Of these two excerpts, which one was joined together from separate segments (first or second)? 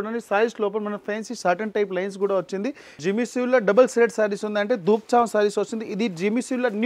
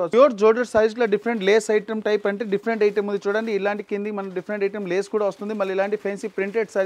first